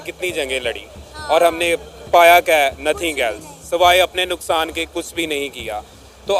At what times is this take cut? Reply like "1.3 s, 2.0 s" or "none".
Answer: none